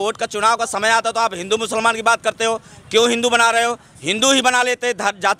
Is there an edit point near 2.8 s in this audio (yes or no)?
no